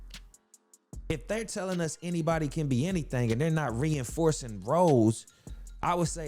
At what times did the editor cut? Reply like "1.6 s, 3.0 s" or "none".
none